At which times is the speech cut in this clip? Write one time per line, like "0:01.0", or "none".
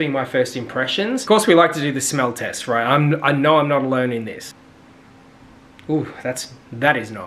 0:01.2
0:04.5